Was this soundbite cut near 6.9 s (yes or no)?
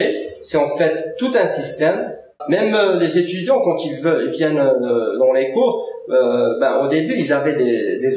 no